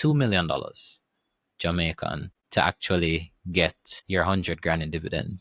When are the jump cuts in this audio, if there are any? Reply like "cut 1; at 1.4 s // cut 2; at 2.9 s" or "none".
cut 1; at 2.3 s // cut 2; at 3.9 s

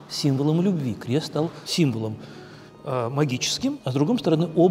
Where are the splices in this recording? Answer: cut 1; at 1.6 s // cut 2; at 3.8 s

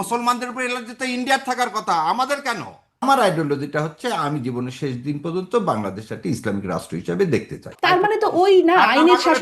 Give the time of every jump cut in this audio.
cut 1; at 3.0 s // cut 2; at 7.7 s

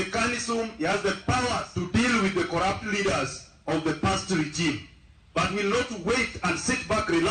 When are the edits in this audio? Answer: cut 1; at 1.7 s

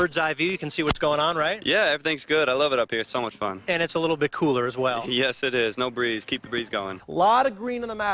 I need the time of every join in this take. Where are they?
cut 1; at 7.0 s

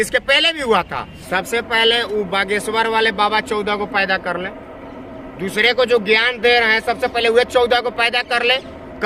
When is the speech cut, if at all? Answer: cut 1; at 1.1 s

